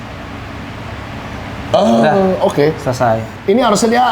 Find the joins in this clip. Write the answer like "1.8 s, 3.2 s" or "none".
none

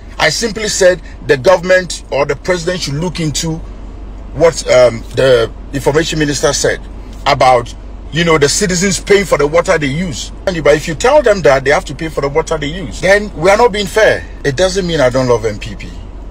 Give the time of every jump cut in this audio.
10.5 s, 14.3 s

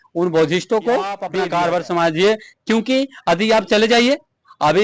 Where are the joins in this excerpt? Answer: 1.3 s

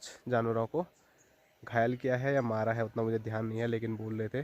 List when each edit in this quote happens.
none

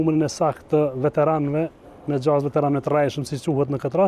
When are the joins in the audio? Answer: none

